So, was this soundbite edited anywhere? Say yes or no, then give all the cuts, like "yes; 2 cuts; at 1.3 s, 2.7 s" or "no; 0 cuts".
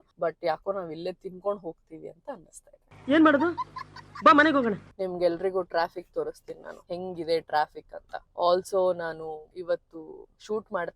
no; 0 cuts